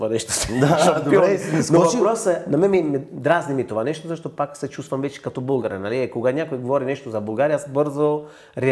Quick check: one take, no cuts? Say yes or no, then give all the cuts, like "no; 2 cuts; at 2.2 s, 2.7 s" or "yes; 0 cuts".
yes; 0 cuts